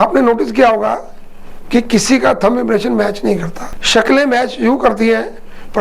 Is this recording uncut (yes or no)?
yes